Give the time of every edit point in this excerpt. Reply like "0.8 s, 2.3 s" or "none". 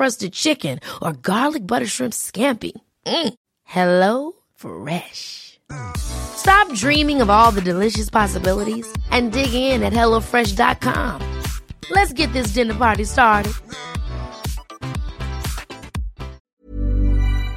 16.5 s